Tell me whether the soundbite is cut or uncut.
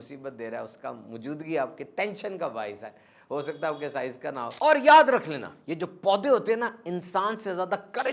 cut